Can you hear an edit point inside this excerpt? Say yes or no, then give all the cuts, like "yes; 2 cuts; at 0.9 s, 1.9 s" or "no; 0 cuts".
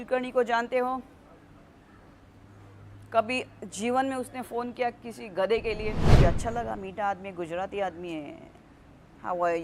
yes; 1 cut; at 6.1 s